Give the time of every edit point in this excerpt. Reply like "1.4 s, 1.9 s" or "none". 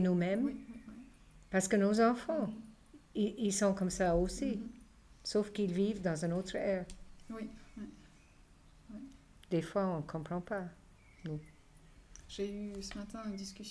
none